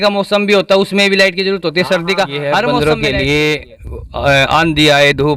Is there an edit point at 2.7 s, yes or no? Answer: yes